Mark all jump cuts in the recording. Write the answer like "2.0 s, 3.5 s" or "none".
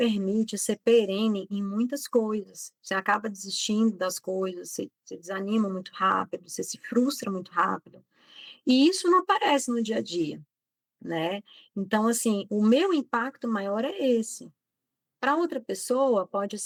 none

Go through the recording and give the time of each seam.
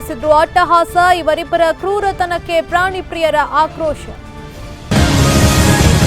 4.9 s

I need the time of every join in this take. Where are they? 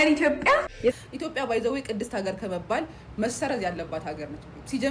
0.9 s

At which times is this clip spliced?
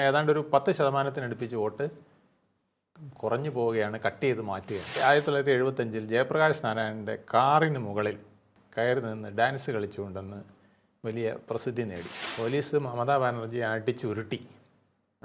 5.0 s, 12.2 s

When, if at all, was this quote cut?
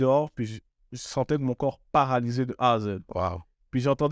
none

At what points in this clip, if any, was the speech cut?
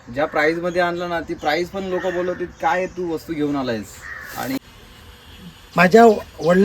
4.6 s

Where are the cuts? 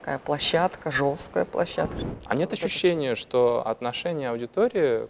2.0 s

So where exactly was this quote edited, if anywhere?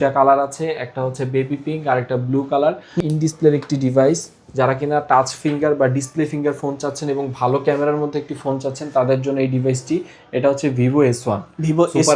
3.0 s

